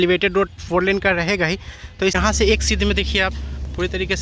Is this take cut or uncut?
cut